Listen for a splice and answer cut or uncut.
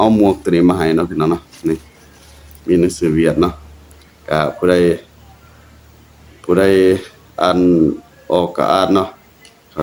uncut